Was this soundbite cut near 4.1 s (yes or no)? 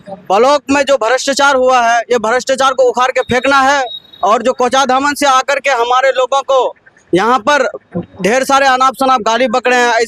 no